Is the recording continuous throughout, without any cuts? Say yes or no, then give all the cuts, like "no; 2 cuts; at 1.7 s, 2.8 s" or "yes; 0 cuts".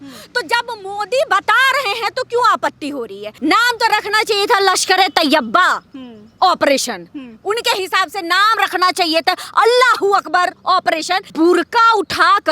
no; 2 cuts; at 3.2 s, 11.3 s